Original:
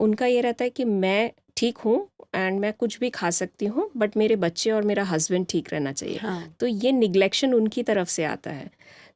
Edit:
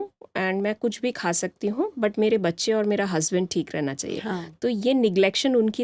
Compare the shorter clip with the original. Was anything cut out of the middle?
no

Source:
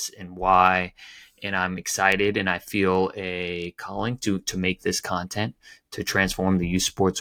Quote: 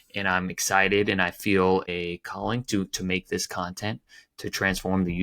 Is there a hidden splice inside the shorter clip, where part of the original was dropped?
yes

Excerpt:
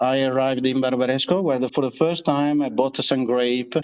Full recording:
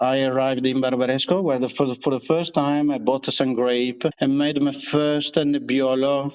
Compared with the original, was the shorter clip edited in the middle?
yes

